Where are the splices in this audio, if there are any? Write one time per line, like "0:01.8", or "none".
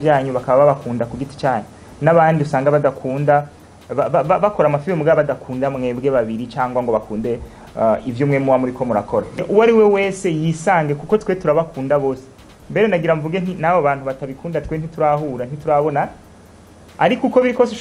0:09.4